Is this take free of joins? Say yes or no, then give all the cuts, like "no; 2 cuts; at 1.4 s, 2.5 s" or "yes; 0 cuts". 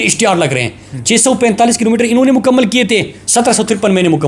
yes; 0 cuts